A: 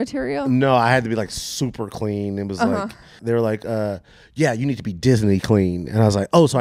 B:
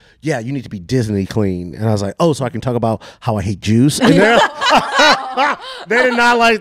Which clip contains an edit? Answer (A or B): A